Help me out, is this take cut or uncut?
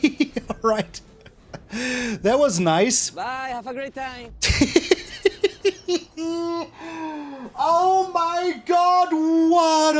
uncut